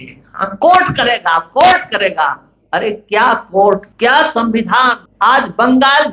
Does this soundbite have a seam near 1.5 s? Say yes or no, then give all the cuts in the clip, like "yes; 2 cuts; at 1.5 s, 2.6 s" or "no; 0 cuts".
no; 2 cuts; at 3.9 s, 5.0 s